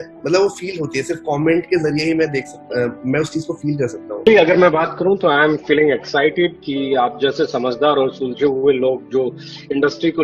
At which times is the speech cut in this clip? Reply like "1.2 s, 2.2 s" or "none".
4.3 s

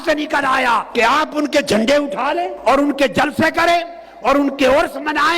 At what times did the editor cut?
0.9 s, 2.5 s

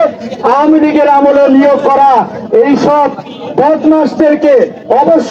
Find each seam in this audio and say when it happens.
none

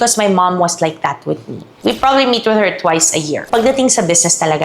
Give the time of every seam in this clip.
1.7 s, 3.4 s

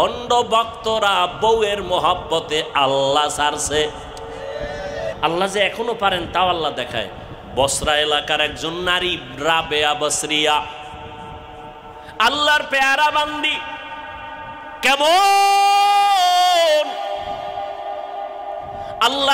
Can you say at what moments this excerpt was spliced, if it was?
5.1 s

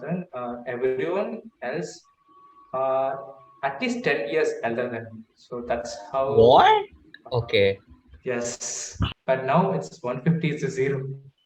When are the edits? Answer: 8.9 s

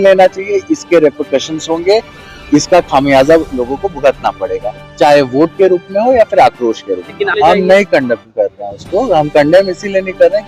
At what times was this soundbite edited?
7.3 s

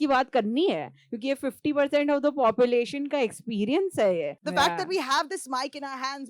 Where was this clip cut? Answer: 4.4 s

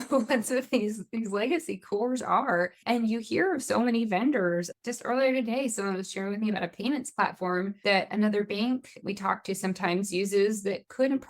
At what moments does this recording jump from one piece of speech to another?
2.8 s, 4.7 s, 8.1 s, 9.0 s

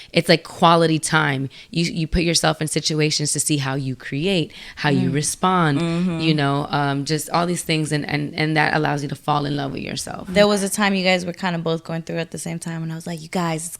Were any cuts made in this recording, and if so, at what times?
10.4 s

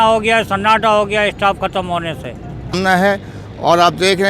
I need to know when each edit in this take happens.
2.8 s

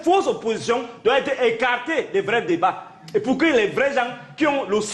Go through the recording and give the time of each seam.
none

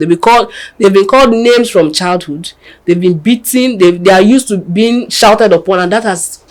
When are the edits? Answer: none

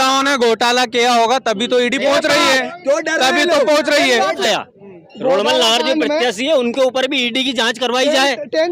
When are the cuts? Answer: 4.4 s

